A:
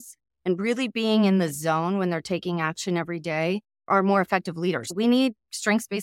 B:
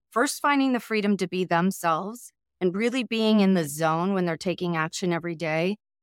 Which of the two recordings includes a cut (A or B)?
A